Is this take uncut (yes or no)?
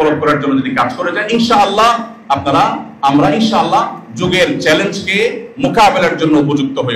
yes